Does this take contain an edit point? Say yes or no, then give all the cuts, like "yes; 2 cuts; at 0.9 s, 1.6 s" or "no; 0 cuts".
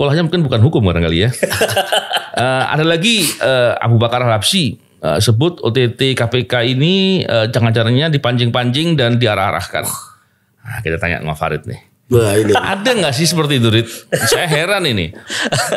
no; 0 cuts